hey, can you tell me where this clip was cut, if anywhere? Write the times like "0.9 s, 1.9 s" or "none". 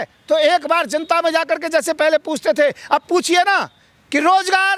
none